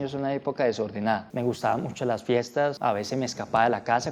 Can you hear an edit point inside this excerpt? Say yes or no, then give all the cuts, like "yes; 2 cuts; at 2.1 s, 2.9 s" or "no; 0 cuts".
yes; 2 cuts; at 1.3 s, 2.8 s